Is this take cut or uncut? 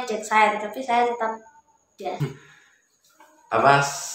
cut